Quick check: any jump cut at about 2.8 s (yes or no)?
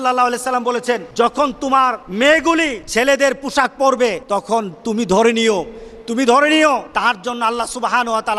yes